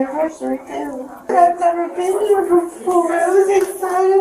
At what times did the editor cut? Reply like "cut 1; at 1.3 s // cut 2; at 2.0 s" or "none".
cut 1; at 1.3 s